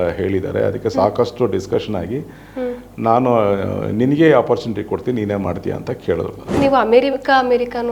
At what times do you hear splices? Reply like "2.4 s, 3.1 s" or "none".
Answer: 6.6 s